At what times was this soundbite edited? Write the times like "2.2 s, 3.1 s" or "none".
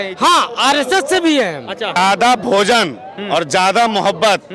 2.0 s